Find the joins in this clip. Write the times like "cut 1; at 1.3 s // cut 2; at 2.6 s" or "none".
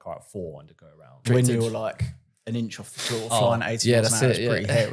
cut 1; at 1.2 s